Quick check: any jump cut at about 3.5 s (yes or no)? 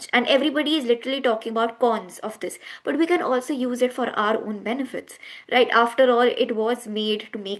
no